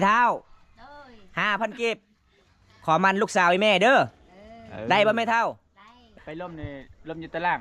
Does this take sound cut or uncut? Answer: cut